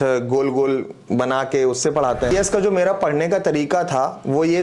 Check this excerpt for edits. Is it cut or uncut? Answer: cut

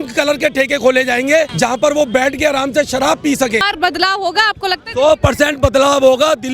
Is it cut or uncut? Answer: cut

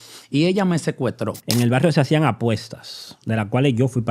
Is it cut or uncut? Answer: cut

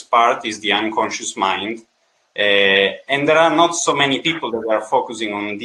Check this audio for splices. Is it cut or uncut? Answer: uncut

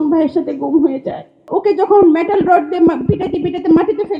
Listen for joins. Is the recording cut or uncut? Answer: cut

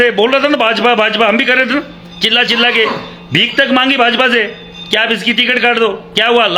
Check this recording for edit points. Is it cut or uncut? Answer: uncut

